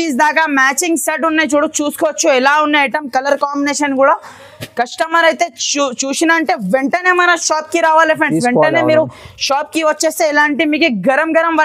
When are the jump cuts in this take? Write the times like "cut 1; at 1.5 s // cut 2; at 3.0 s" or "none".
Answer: none

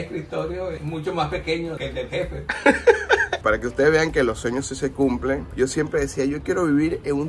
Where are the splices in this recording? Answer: cut 1; at 3.4 s

